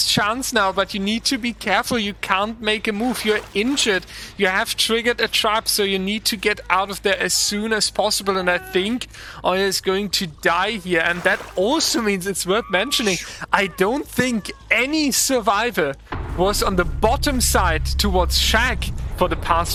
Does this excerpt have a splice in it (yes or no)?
no